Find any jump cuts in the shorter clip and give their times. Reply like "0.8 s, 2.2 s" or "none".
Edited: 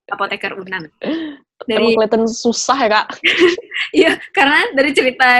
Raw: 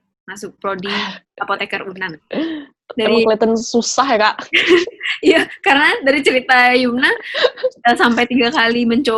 none

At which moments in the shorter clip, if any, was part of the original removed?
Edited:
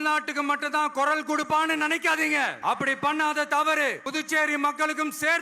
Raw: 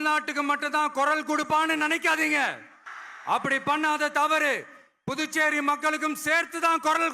2.5 s, 4.0 s

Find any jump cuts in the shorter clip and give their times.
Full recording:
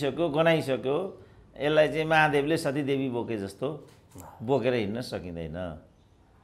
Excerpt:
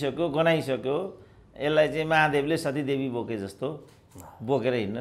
none

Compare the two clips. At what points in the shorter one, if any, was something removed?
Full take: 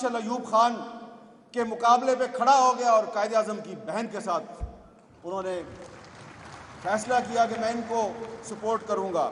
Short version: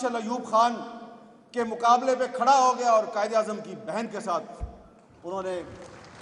none

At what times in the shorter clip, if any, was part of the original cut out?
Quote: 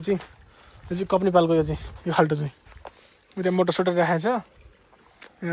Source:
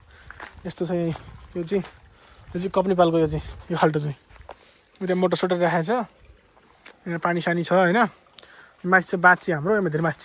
none

